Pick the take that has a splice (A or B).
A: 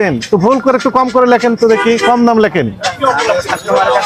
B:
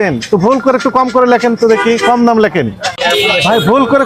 B